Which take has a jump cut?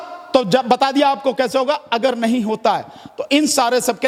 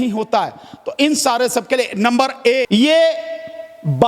second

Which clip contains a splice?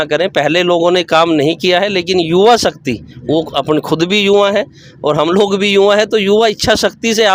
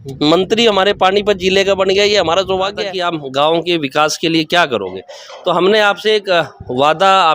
second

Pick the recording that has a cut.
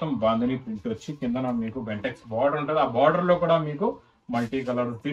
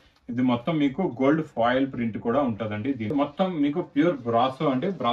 second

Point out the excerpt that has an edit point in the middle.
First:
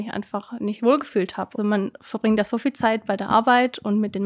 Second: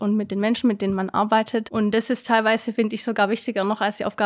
second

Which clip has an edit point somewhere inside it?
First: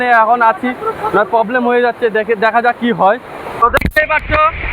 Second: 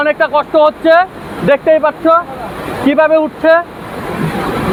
first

